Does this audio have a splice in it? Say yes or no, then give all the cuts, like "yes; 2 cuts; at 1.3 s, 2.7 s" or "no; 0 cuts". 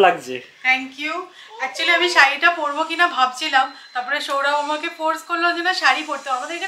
no; 0 cuts